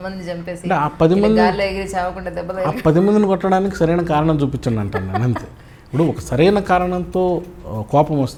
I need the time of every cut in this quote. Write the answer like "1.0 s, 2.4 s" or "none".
none